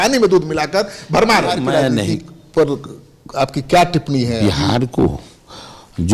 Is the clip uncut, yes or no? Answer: no